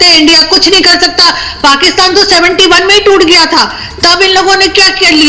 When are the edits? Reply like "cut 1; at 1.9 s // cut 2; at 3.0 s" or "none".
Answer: cut 1; at 3.8 s